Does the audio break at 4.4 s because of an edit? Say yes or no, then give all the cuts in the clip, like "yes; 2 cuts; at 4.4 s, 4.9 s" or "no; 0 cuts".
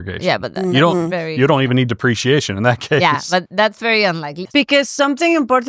yes; 1 cut; at 4.4 s